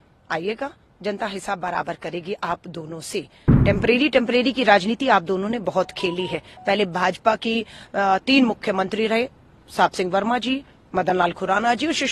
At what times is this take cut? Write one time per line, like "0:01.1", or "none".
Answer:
0:03.4